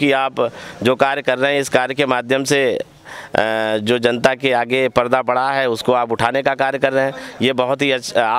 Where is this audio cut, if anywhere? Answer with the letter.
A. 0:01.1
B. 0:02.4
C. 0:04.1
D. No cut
D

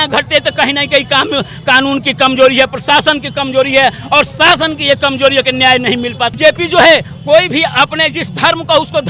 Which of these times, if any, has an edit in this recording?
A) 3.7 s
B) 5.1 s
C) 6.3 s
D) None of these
C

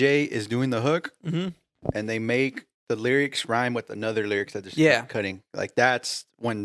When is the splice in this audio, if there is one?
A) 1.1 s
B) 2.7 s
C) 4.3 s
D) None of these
B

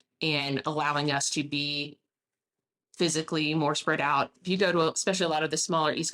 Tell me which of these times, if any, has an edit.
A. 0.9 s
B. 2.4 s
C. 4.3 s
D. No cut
C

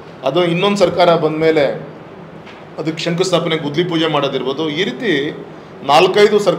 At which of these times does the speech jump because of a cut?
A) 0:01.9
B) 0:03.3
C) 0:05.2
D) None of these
D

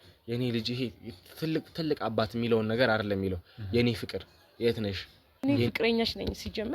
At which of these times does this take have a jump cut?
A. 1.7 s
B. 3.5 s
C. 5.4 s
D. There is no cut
C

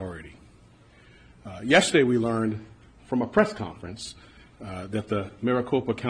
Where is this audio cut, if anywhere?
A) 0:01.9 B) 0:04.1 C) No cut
A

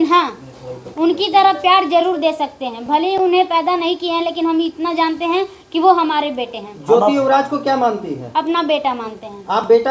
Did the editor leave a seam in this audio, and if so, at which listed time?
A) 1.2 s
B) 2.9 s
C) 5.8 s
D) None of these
D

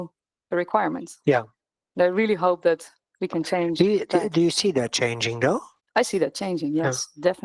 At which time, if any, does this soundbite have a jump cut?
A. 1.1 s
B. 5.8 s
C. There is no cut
B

